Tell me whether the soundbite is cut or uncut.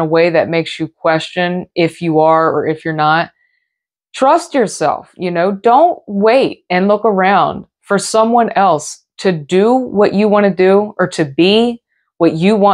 uncut